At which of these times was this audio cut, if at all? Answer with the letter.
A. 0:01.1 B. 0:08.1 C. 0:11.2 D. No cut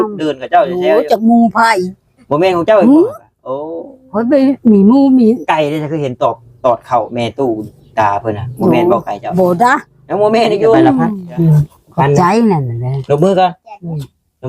C